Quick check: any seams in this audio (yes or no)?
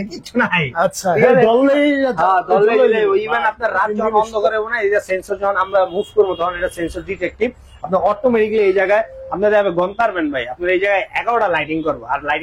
no